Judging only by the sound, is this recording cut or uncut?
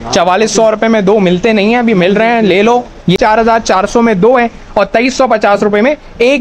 cut